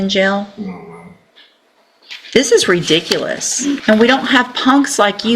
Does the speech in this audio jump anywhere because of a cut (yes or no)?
yes